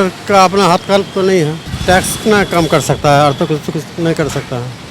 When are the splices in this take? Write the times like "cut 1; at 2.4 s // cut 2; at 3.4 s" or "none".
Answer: cut 1; at 1.7 s